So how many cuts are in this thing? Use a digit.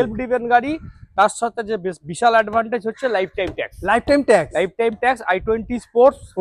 0